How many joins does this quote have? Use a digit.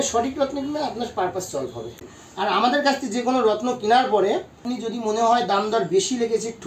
2